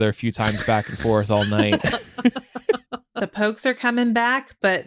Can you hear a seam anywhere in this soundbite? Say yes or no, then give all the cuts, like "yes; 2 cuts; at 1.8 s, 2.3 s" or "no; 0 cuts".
no; 0 cuts